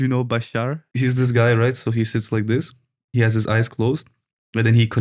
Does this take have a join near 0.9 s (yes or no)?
yes